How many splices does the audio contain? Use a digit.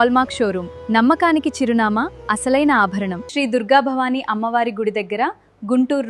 1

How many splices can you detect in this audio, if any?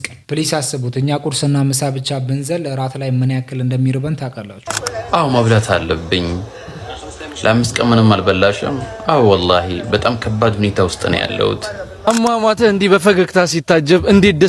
2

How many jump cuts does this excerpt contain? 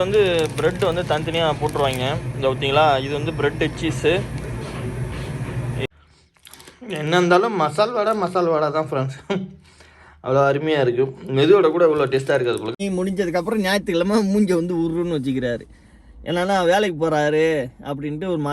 2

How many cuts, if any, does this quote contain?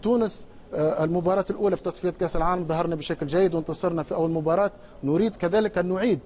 0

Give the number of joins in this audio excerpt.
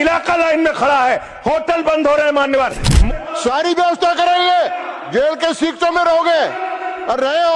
2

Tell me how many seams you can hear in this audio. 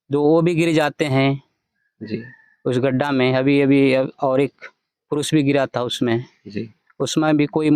0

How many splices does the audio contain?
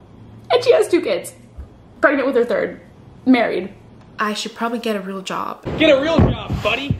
1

